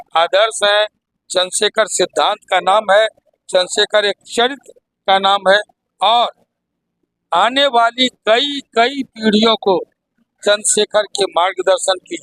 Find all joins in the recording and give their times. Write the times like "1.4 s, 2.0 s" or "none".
none